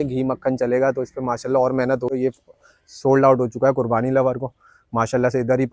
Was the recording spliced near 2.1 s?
yes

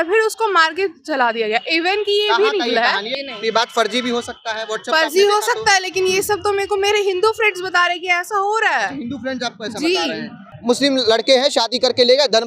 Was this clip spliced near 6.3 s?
no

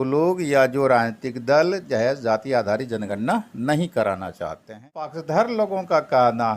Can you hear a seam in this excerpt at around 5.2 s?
yes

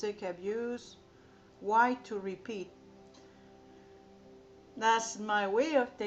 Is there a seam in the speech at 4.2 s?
yes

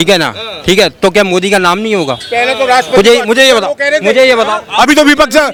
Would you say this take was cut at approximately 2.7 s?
no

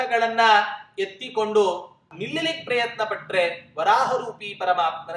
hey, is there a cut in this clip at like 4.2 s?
no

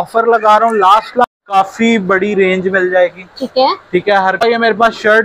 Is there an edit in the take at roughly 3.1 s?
no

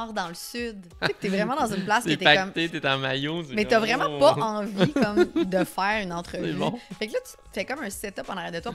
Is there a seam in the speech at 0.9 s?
yes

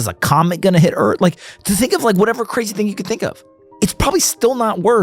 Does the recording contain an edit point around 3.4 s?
no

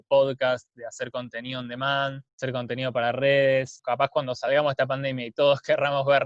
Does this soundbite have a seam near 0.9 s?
no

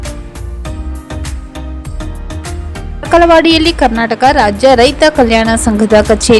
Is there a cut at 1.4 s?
no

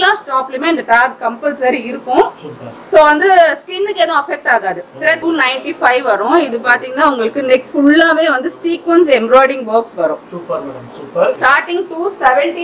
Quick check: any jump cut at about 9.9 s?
no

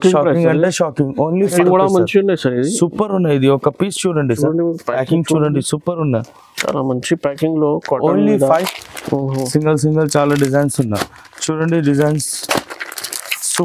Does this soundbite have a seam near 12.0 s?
no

